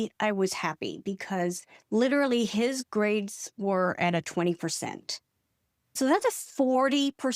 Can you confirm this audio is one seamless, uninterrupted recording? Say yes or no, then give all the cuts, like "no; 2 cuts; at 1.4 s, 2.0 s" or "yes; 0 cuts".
no; 1 cut; at 6.0 s